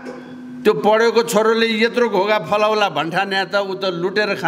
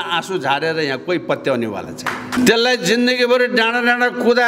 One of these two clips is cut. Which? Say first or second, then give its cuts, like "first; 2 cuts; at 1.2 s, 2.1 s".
second; 1 cut; at 2.4 s